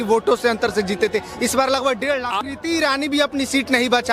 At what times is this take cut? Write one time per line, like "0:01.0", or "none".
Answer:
0:02.4